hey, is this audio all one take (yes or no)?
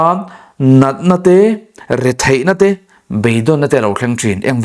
yes